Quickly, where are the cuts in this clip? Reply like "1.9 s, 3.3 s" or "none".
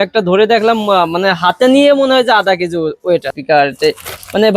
3.3 s